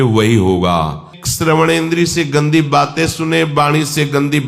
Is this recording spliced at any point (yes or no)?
yes